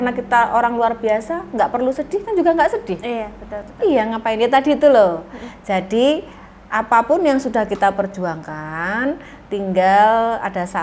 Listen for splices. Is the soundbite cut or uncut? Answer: uncut